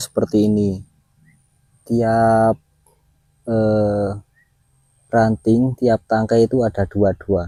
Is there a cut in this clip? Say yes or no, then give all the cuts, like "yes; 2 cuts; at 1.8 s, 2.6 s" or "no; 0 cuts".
no; 0 cuts